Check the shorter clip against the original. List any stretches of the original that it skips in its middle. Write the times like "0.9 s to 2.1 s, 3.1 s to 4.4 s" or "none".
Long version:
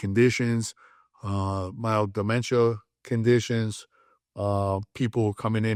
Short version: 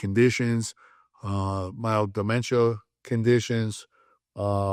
none

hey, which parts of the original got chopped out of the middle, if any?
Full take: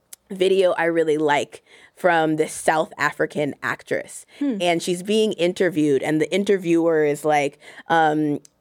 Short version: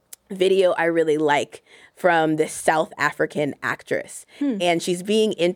none

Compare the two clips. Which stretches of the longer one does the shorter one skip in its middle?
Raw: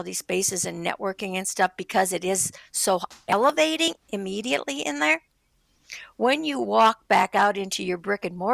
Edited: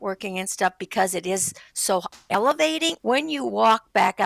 4.0 s to 6.1 s

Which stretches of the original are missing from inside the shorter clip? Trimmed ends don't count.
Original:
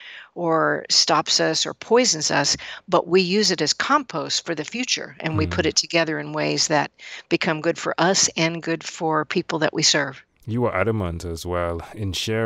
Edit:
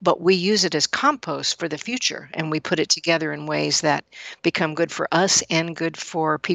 none

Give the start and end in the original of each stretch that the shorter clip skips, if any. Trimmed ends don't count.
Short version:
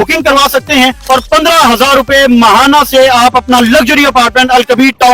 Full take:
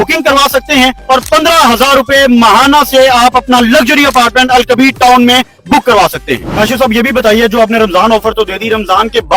none

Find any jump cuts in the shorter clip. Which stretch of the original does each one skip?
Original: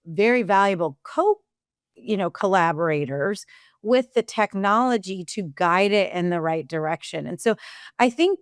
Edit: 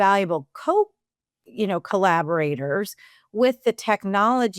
none

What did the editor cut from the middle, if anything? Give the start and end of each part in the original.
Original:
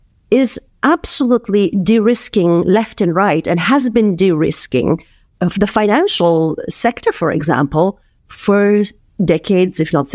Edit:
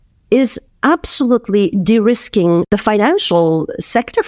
2.7 s to 5.5 s

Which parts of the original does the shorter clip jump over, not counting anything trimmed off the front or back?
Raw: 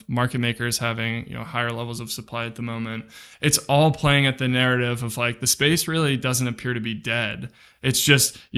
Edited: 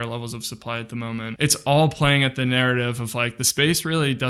3.0 s to 3.4 s

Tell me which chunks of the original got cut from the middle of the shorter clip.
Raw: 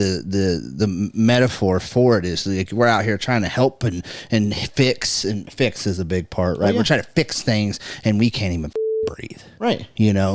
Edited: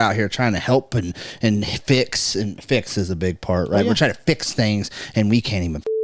none

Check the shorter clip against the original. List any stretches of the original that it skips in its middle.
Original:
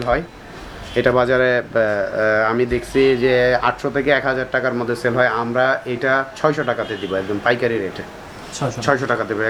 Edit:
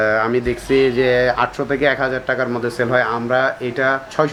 none

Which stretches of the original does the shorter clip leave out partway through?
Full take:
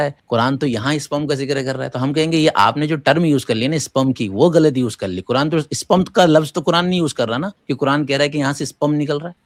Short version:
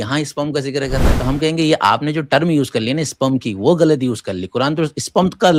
none

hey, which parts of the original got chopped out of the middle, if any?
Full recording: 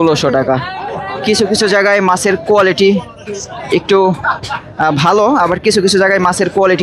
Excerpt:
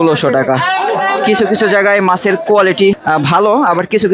3.0 s to 4.7 s

